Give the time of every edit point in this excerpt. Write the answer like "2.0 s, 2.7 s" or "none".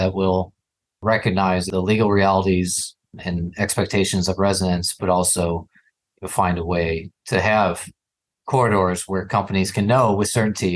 1.7 s